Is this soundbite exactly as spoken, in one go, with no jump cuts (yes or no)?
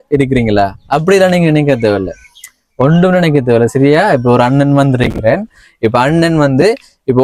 yes